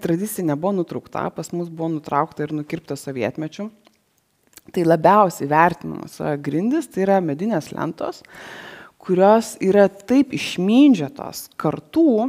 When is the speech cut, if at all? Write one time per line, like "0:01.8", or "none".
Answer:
0:06.0